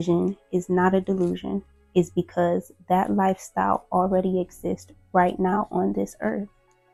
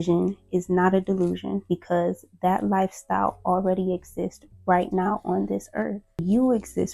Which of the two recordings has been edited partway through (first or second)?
second